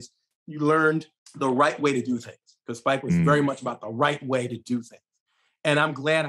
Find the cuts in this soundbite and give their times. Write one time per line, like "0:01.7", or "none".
0:01.2